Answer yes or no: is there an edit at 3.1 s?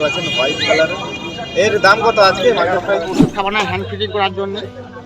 yes